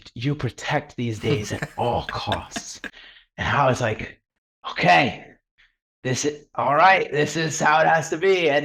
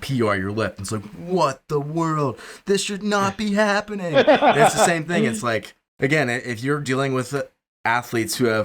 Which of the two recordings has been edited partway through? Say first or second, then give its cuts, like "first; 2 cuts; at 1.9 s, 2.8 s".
second; 1 cut; at 5.8 s